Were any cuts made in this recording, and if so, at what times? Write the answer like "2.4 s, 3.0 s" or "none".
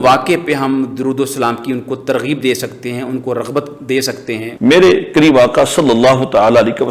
4.5 s